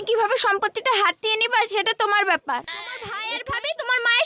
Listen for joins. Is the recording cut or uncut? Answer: cut